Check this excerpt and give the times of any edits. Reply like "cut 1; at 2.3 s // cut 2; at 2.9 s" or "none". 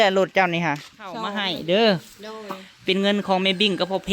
cut 1; at 1.4 s